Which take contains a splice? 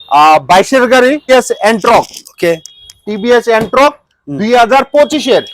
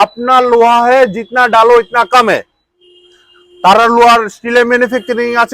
first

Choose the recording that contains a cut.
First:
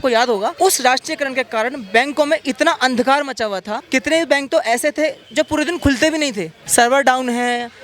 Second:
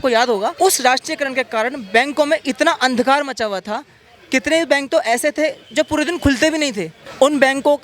first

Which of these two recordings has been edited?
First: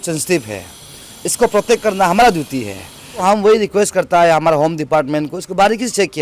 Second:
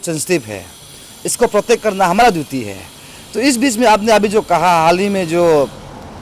first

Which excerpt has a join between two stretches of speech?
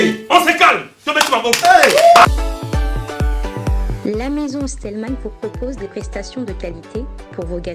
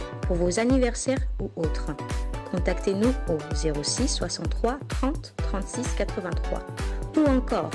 first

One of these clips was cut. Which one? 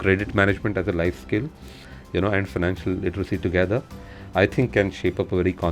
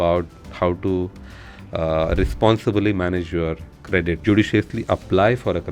second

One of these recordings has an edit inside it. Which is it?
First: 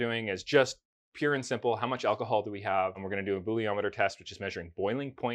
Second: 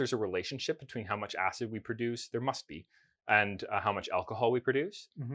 first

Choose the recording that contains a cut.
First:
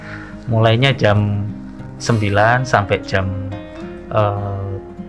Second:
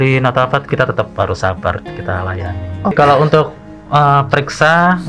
second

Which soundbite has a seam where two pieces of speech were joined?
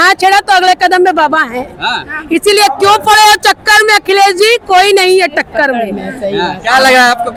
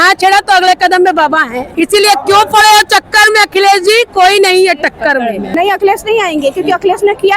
second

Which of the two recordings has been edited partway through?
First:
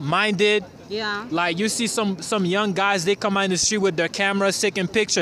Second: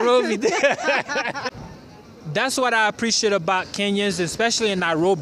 second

